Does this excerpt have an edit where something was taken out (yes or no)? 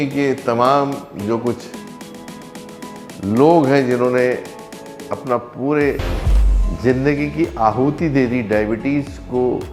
no